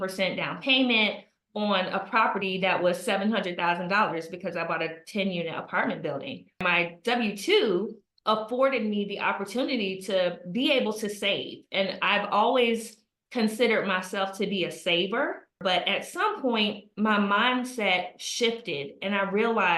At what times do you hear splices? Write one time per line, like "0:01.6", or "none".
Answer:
0:06.6
0:15.6